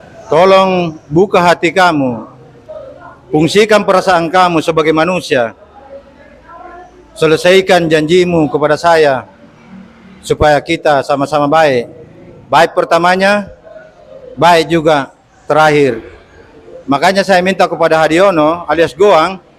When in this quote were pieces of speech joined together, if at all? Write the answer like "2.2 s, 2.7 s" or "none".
none